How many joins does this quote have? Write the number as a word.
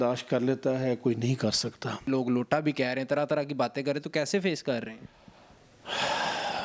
one